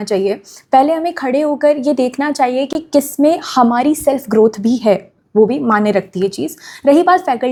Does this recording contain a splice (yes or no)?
no